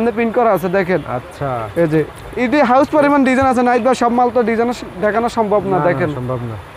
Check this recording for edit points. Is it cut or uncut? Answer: uncut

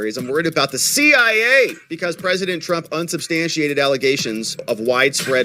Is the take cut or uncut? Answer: cut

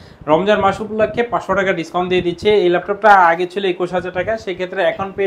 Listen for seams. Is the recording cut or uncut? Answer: uncut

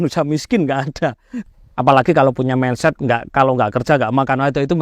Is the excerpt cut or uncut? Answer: cut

